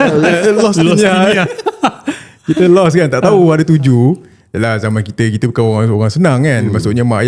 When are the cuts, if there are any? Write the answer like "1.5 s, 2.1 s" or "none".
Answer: none